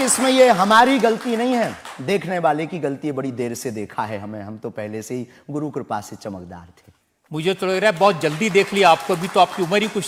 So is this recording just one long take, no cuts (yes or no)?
yes